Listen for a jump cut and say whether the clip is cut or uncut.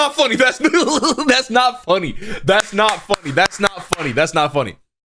uncut